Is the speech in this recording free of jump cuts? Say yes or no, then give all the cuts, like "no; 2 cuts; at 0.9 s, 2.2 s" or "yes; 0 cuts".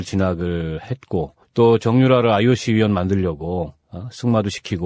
yes; 0 cuts